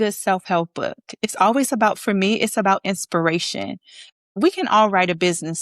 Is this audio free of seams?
no; 1 cut; at 4.2 s

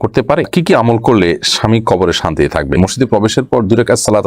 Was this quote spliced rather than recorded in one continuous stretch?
yes; 1 cut; at 2.8 s

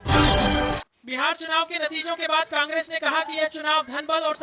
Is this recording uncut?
no; 1 cut; at 1.0 s

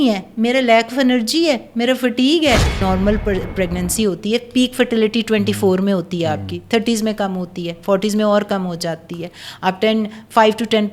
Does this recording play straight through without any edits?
no; 1 cut; at 2.8 s

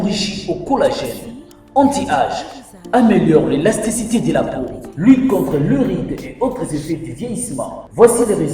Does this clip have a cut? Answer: yes; 1 cut; at 1.2 s

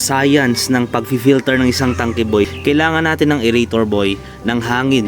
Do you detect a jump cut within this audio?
yes; 1 cut; at 2.5 s

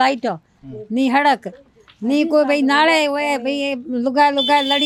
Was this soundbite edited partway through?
no; 0 cuts

